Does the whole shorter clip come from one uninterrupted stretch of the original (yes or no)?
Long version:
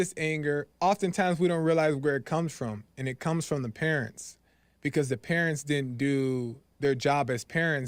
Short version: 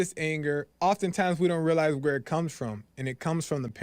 yes